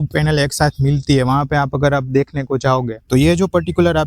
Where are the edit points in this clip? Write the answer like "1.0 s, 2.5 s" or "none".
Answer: 3.0 s